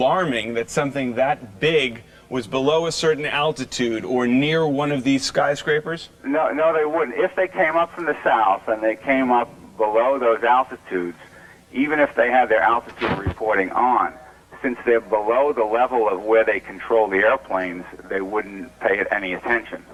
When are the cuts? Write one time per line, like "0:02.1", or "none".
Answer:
none